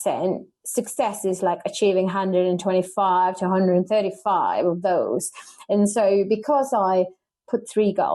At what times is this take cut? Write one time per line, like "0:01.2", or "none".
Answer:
none